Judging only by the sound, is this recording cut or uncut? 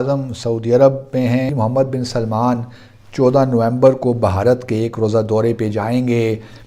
cut